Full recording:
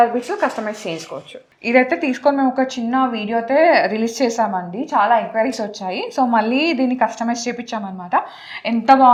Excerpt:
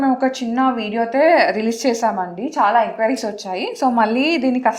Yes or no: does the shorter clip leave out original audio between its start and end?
no